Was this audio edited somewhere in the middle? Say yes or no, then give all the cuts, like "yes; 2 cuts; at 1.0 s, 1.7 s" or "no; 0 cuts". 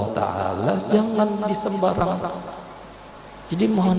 no; 0 cuts